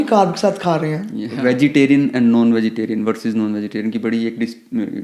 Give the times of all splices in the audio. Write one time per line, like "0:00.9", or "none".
0:01.2